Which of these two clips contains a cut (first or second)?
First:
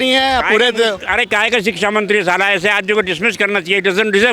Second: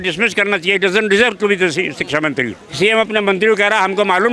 second